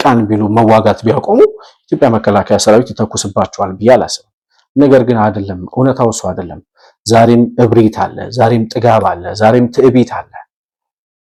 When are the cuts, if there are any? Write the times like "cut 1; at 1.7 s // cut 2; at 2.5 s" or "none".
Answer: none